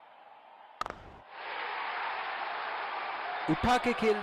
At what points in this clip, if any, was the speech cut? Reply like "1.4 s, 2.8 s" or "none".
1.0 s